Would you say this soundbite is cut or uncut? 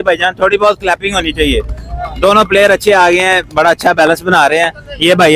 uncut